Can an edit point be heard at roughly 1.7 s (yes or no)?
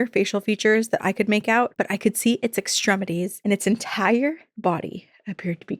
yes